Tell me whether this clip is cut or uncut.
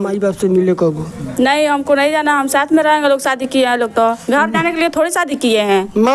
uncut